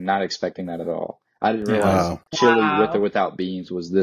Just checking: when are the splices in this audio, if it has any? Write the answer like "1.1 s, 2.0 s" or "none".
none

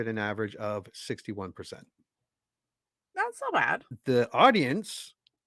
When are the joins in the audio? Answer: 3.9 s

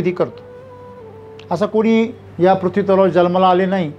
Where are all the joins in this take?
2.2 s

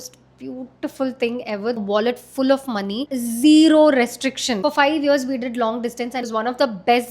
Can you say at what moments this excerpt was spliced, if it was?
1.8 s, 3.1 s, 4.6 s, 6.1 s

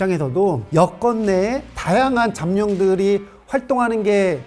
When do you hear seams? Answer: none

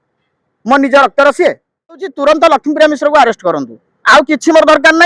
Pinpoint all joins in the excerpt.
2.1 s

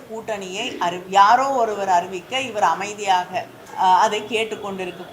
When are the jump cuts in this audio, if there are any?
3.6 s

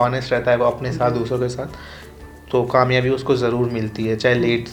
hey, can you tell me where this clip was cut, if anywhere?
none

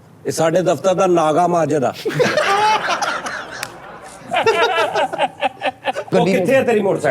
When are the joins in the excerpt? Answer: 6.1 s

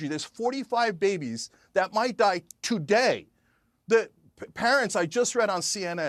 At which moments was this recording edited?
none

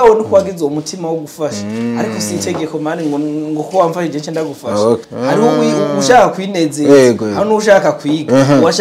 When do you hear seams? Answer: 5.1 s

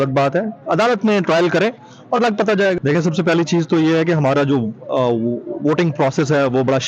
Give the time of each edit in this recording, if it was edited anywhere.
2.9 s

